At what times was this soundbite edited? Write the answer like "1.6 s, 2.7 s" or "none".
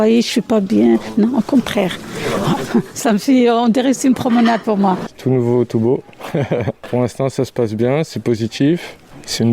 5.0 s, 6.8 s